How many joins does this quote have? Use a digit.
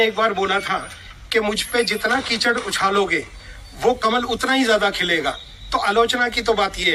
0